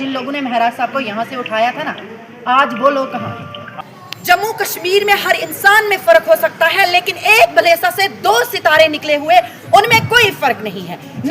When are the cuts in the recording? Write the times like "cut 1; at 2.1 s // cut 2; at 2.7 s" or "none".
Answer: cut 1; at 3.8 s